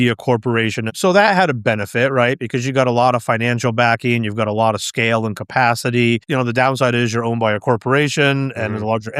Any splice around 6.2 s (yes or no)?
yes